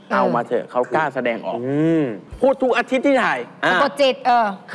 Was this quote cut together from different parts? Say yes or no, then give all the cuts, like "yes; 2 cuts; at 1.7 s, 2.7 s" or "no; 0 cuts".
yes; 1 cut; at 2.3 s